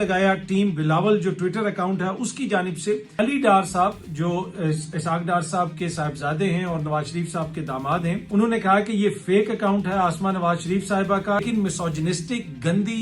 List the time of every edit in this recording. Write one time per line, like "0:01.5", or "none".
0:03.1
0:08.2
0:11.4